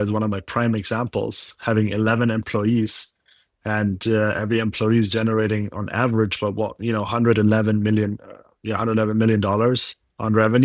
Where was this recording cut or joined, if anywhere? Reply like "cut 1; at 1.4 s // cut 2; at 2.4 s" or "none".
none